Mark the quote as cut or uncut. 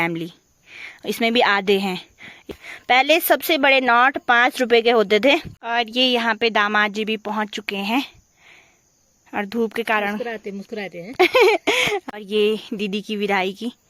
cut